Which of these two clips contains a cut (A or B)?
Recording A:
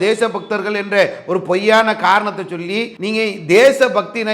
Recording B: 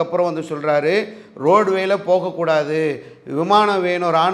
A